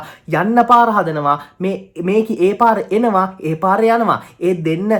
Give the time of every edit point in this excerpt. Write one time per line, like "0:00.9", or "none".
none